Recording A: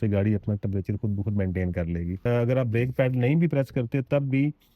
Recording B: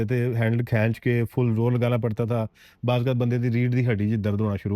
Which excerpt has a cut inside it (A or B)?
A